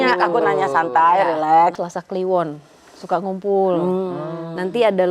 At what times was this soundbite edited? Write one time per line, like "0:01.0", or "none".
0:01.8

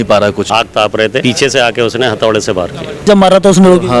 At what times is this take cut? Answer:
0:00.9
0:03.1

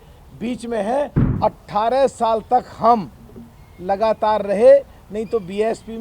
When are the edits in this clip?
0:01.2

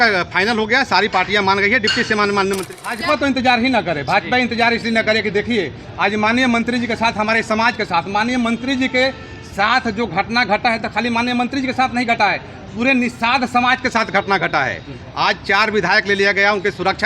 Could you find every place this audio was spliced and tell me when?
0:02.7

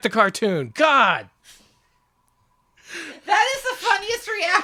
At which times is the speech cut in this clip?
0:02.8

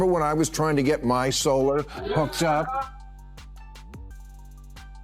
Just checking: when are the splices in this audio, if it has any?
0:02.9

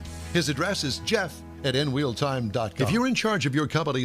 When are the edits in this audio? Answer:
0:02.8

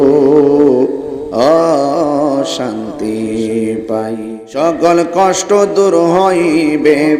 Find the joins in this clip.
0:04.2

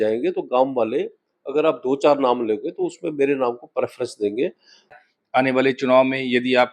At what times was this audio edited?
0:05.0

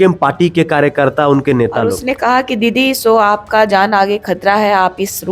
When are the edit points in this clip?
0:02.0

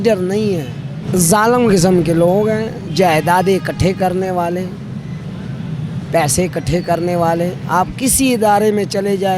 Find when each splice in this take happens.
0:00.9

